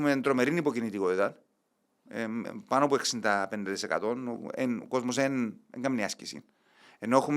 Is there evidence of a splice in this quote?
no; 0 cuts

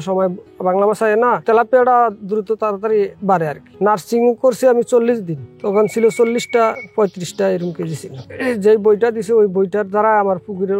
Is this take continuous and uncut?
no; 2 cuts; at 3.6 s, 8.3 s

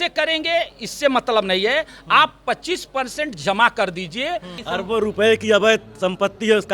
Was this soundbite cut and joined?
yes; 1 cut; at 4.6 s

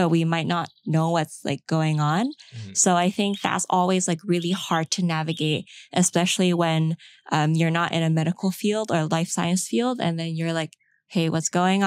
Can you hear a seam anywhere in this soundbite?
no; 0 cuts

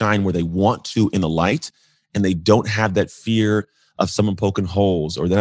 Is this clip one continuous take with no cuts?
yes; 0 cuts

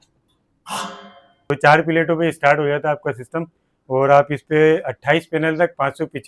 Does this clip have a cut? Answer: yes; 1 cut; at 1.5 s

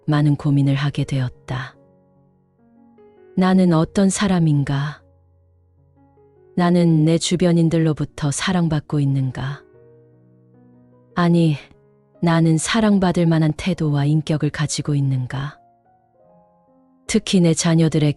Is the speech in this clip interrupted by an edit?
yes; 2 cuts; at 1.7 s, 3.3 s

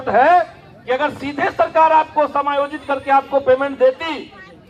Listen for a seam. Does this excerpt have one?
no; 0 cuts

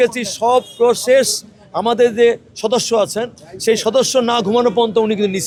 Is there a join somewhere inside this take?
no; 0 cuts

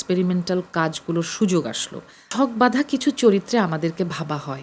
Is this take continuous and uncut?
no; 1 cut; at 2.2 s

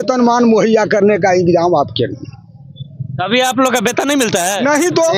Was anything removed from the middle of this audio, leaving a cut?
no; 0 cuts

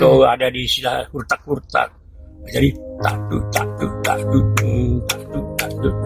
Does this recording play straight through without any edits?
yes; 0 cuts

